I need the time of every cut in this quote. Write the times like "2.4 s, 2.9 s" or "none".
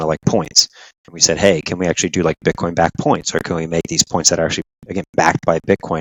none